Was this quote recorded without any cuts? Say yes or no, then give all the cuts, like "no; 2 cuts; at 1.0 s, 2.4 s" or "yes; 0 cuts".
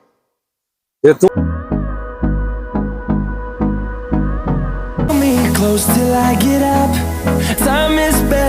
no; 2 cuts; at 1.3 s, 5.1 s